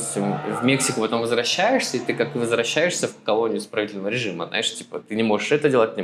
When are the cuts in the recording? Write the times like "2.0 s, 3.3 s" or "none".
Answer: none